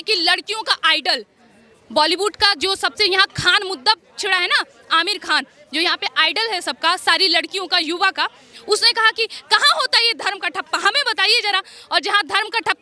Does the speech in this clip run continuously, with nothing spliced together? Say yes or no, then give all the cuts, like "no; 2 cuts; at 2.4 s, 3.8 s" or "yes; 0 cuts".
yes; 0 cuts